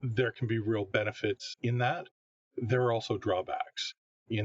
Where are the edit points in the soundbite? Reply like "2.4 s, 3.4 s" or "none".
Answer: 1.5 s